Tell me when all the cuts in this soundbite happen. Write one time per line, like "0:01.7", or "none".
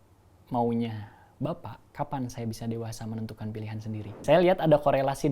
0:01.8
0:04.2